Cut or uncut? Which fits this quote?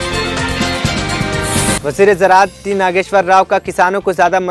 uncut